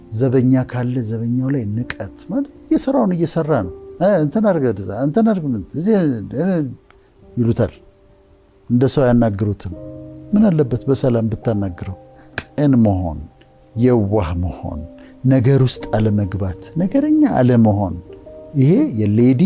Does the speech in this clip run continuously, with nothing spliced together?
no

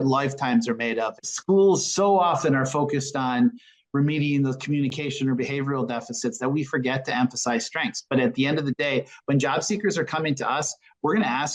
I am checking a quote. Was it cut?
yes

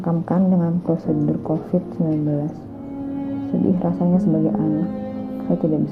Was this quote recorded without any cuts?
yes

